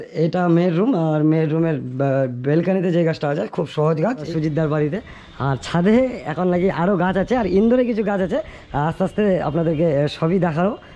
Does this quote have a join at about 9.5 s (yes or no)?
no